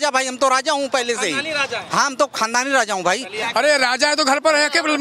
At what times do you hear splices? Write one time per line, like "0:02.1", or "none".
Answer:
0:03.4